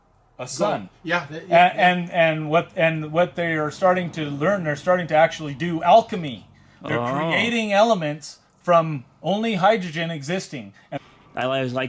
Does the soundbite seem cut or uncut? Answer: cut